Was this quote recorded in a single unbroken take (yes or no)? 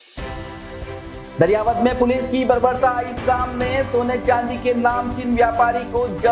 yes